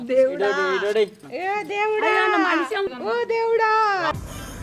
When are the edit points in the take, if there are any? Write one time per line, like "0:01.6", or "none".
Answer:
0:01.3
0:02.9